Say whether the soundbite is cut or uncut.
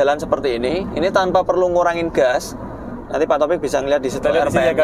uncut